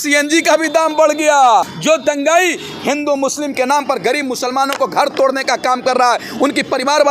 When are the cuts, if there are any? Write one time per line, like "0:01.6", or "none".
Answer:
0:01.7